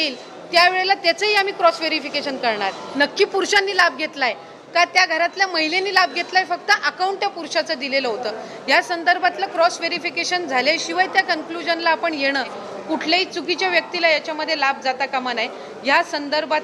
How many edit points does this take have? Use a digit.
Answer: 2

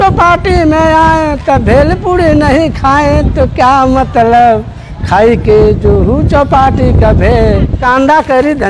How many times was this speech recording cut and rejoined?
1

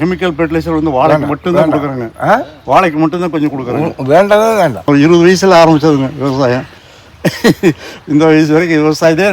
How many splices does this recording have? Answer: 1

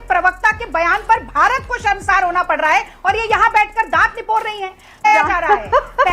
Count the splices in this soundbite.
2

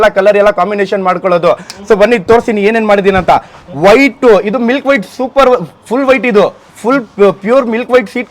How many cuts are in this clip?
0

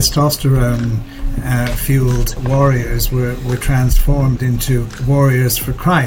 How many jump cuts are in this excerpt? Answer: 2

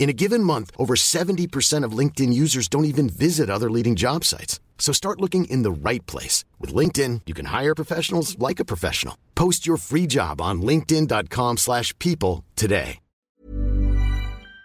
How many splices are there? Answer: 1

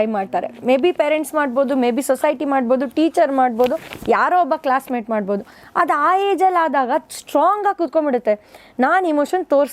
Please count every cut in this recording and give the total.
0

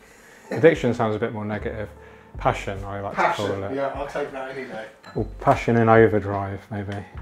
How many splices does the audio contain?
0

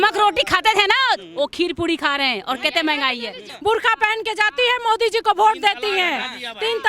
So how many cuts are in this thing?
1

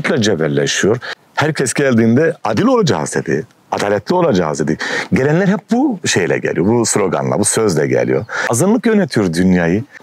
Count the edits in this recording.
2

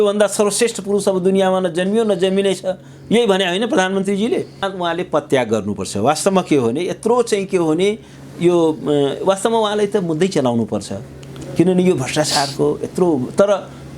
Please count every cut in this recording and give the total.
1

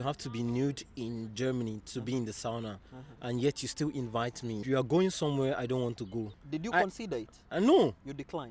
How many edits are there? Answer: 2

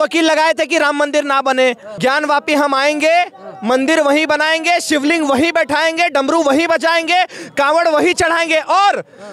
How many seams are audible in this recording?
1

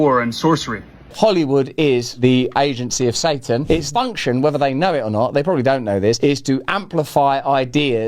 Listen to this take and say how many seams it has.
1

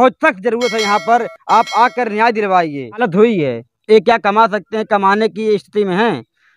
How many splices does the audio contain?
1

